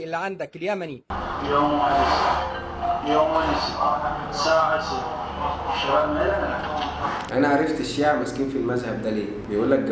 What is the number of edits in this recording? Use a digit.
1